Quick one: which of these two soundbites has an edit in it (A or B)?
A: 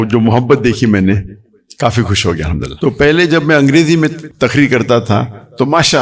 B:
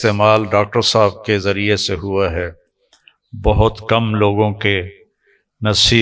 A